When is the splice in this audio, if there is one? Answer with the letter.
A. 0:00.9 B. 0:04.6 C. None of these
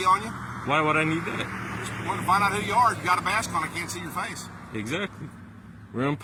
C